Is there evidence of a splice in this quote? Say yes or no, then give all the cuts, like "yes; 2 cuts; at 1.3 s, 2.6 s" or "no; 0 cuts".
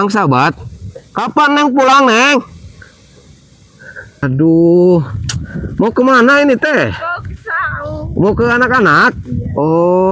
yes; 1 cut; at 4.2 s